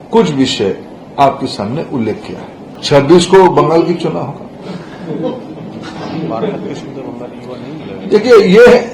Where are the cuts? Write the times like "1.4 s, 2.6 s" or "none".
2.7 s